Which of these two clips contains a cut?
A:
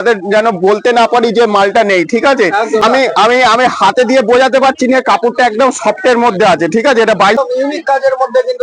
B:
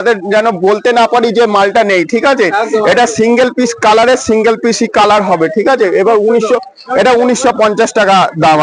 A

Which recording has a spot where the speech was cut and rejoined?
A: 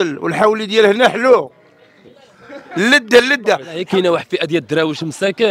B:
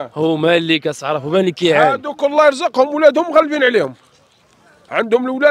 A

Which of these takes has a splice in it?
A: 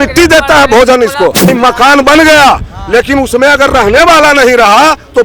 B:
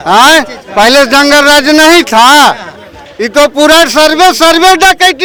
A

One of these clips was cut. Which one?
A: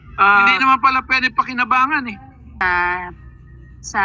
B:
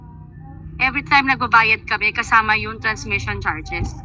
A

